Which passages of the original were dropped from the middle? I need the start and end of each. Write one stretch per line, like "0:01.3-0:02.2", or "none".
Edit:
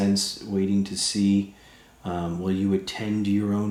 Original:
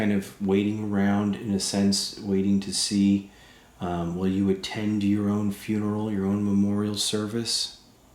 none